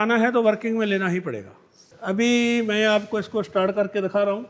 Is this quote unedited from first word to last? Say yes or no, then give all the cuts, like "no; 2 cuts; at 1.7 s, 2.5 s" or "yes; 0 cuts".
no; 1 cut; at 1.9 s